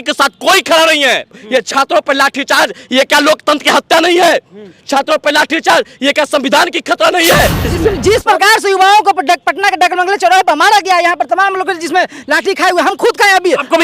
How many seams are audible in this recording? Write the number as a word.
two